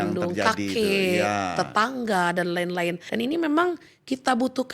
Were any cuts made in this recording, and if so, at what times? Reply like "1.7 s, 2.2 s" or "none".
3.0 s